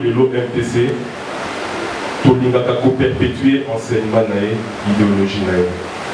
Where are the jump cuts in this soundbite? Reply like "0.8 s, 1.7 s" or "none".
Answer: none